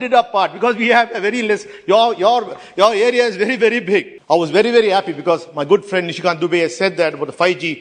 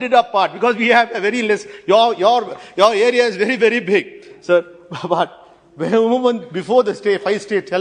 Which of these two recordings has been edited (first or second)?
first